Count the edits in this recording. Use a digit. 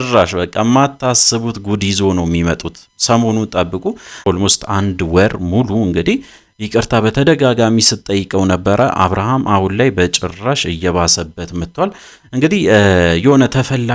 1